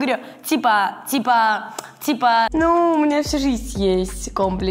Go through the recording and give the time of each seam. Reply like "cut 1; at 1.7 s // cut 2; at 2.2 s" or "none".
cut 1; at 2.5 s